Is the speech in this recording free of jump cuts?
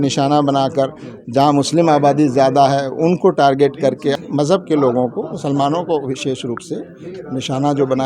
no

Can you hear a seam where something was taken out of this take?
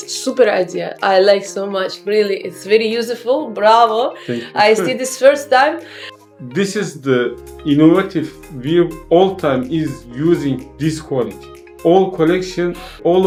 no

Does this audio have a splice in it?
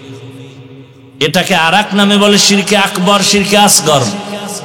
no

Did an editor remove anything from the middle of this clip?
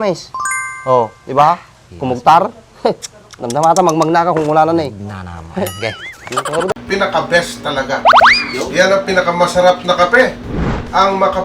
yes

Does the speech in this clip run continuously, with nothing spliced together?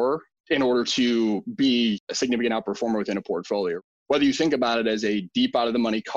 no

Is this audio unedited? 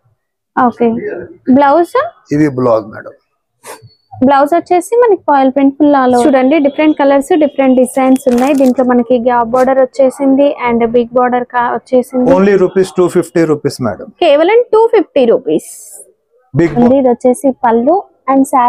no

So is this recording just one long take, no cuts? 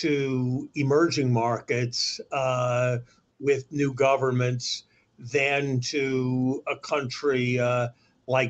yes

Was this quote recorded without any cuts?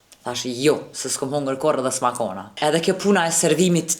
no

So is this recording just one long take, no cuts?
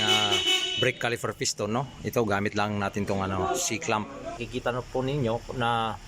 no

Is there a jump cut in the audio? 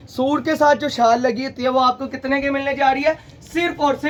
no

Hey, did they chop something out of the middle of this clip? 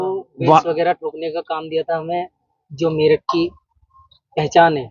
no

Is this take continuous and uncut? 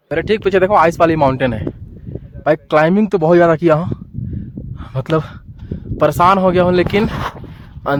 yes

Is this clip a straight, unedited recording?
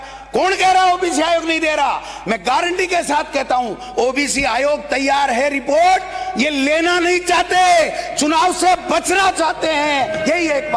yes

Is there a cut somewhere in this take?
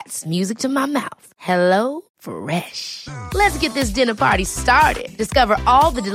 no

